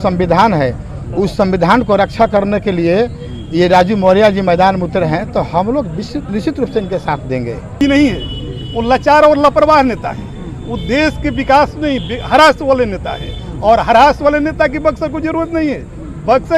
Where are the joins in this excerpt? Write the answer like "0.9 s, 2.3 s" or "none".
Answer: 7.8 s